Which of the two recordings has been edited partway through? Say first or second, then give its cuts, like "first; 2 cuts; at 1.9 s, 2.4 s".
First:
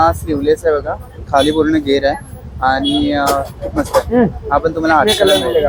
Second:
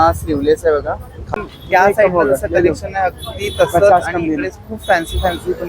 second; 1 cut; at 1.2 s